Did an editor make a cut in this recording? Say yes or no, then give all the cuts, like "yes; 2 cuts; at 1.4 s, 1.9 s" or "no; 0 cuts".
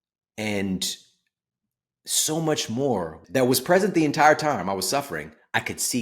yes; 1 cut; at 3.2 s